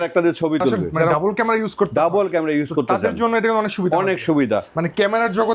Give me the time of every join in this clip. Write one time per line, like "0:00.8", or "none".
0:01.1
0:04.7